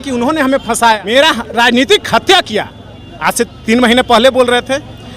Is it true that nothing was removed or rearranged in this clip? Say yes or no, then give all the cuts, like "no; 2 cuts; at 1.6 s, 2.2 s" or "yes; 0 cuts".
no; 1 cut; at 1.0 s